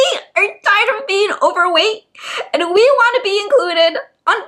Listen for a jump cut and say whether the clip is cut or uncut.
uncut